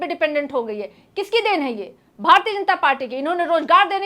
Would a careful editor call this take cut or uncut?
uncut